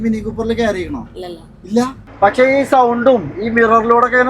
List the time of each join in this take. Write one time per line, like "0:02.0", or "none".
0:02.0